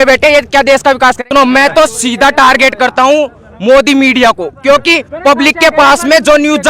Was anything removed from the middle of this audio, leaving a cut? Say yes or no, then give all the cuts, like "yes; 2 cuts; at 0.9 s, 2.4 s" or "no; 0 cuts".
yes; 1 cut; at 1.2 s